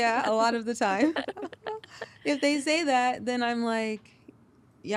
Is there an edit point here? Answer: no; 0 cuts

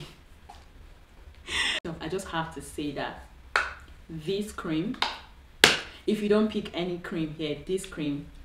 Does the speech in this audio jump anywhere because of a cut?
yes; 1 cut; at 1.8 s

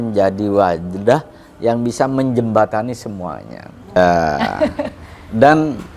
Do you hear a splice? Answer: yes; 1 cut; at 4.0 s

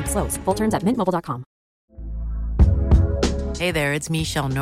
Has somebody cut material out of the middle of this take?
yes; 1 cut; at 1.8 s

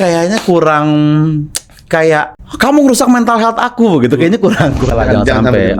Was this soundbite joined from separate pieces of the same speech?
yes; 2 cuts; at 2.4 s, 4.9 s

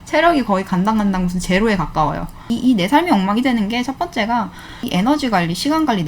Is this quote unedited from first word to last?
no; 2 cuts; at 2.5 s, 4.8 s

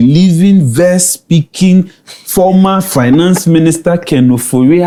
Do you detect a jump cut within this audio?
no; 0 cuts

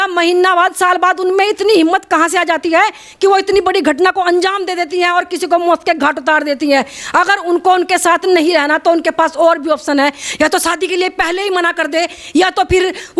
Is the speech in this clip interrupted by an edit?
no; 0 cuts

